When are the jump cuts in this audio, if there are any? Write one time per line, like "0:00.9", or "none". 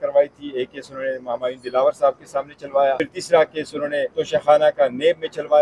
0:03.1
0:04.1